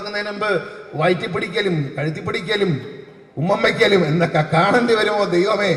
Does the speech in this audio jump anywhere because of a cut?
no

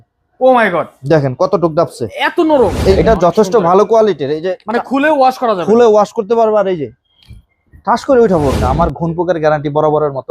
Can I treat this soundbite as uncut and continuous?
no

